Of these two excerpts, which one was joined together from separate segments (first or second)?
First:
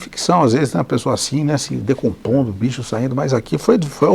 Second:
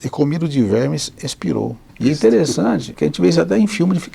second